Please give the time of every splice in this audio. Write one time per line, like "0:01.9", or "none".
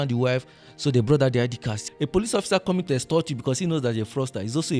0:01.8